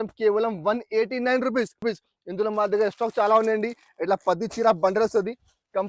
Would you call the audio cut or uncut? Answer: cut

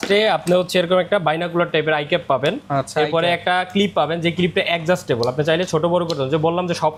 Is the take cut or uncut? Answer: uncut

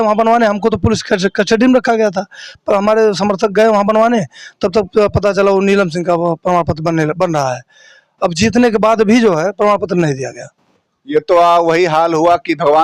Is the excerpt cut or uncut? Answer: uncut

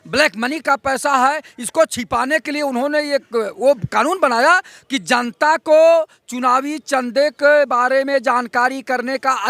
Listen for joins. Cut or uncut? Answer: uncut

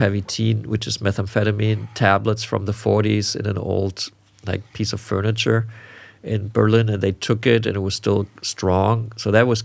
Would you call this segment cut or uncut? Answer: uncut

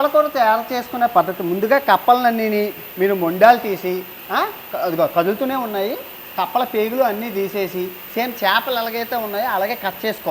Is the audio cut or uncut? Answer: uncut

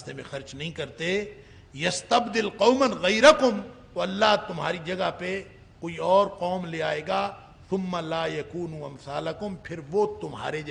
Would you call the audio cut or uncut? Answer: uncut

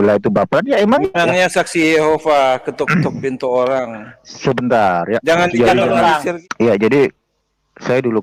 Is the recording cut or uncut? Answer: cut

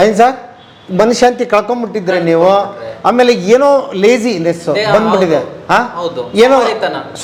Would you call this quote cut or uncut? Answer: uncut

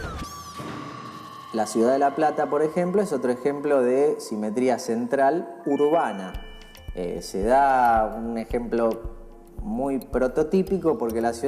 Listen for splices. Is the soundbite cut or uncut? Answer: cut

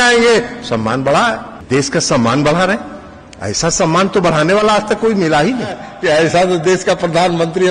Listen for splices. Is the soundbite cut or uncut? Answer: cut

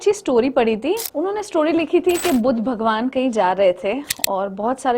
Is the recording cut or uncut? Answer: cut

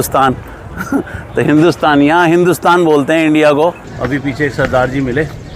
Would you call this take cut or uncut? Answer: cut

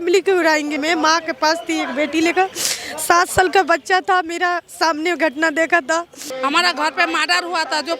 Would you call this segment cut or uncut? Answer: cut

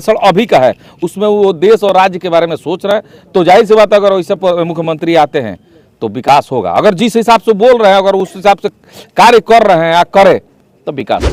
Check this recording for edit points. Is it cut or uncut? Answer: uncut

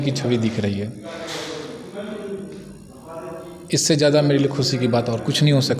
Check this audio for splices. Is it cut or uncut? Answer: uncut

